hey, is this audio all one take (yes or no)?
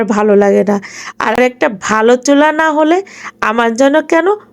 no